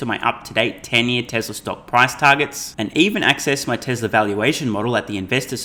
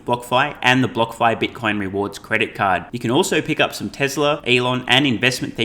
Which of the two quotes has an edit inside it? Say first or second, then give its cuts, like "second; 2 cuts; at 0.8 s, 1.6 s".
second; 1 cut; at 4.4 s